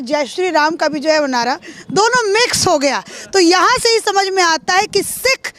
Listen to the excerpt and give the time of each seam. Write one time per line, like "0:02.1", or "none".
none

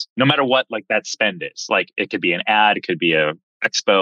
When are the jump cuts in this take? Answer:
0:02.8

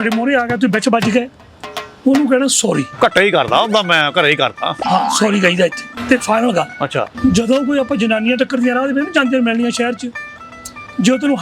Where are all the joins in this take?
0:05.9

